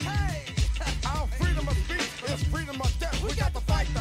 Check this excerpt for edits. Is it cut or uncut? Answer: uncut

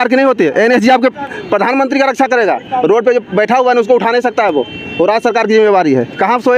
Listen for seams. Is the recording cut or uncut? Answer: uncut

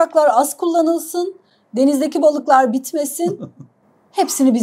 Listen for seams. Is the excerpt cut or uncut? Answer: uncut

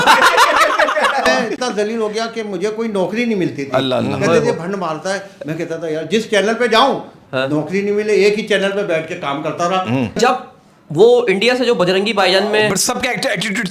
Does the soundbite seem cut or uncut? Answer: cut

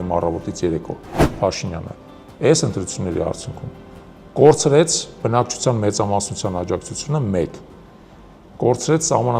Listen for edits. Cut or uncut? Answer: cut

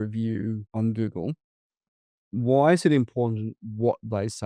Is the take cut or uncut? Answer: cut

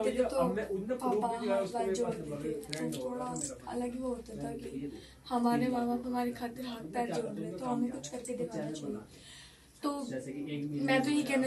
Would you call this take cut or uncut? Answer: uncut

